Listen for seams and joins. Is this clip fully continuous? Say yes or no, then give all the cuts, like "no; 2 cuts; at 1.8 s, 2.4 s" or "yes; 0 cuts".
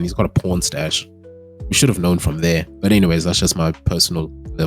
yes; 0 cuts